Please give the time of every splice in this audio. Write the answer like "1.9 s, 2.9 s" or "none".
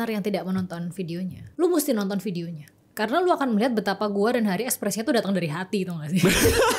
none

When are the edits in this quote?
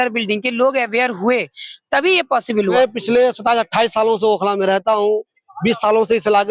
2.7 s

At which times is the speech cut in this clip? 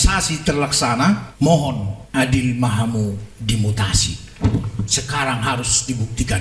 1.3 s, 1.9 s

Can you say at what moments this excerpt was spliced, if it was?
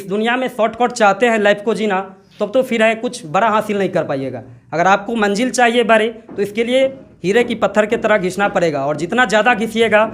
7.1 s

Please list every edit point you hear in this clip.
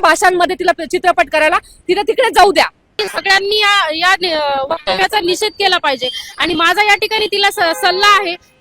3.0 s

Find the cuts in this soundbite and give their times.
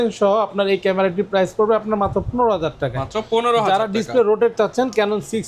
none

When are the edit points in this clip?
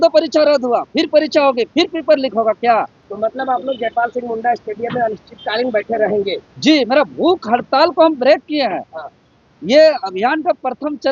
3.0 s

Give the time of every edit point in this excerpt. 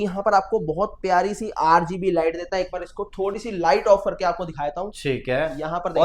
none

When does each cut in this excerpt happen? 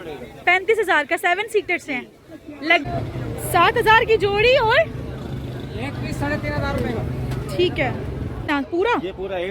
2.9 s, 8.4 s

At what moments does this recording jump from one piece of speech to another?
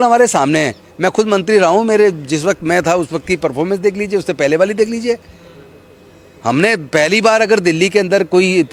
none

